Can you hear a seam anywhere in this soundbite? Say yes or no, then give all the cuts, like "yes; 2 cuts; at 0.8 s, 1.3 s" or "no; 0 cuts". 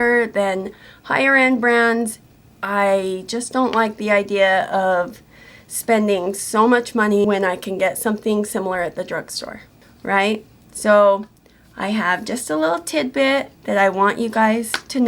yes; 2 cuts; at 2.2 s, 7.2 s